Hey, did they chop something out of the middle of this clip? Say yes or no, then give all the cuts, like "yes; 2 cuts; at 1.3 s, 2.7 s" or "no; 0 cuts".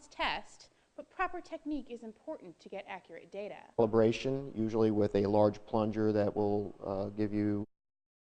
no; 0 cuts